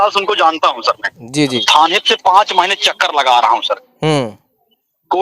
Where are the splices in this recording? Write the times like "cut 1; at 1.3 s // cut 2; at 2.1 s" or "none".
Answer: cut 1; at 1.6 s